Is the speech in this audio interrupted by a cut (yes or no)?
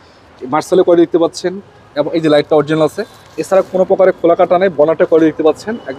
no